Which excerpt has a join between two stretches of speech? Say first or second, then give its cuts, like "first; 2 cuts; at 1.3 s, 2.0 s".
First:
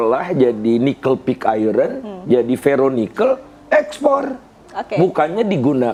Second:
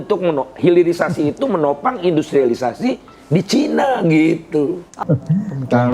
second; 1 cut; at 4.9 s